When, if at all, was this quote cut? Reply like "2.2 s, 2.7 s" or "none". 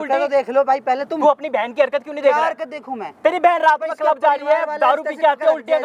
none

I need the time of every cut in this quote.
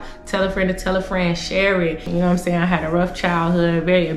2.0 s

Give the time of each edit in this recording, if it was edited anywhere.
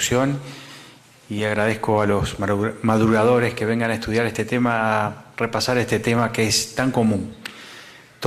none

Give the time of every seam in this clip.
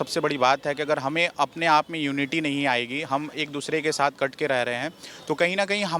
none

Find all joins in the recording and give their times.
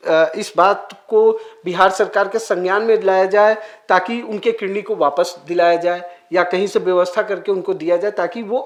none

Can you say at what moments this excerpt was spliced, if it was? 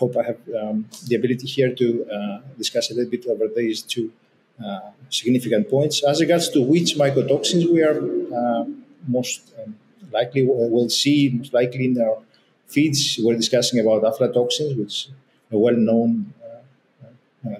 none

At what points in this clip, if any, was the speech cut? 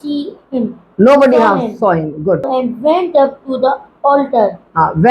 2.5 s

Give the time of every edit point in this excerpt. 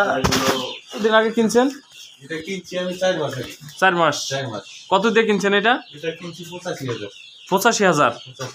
1.0 s

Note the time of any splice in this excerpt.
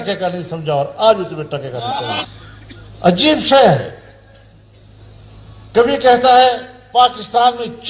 2.2 s

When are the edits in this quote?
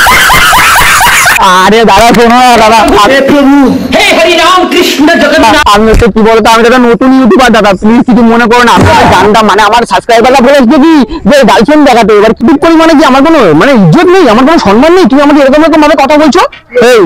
1.4 s, 12.4 s

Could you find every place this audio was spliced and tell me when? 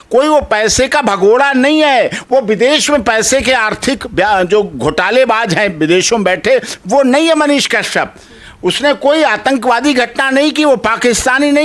none

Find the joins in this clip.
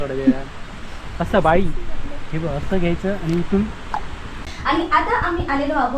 4.4 s

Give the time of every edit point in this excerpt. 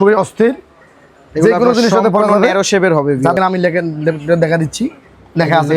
3.4 s

